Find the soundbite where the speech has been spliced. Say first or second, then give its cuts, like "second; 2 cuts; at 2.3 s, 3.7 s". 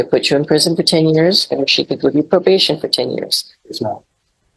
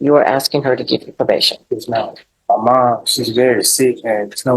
second; 1 cut; at 2.3 s